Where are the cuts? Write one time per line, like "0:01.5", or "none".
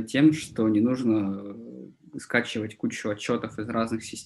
none